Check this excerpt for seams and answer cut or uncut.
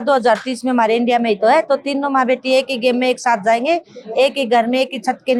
uncut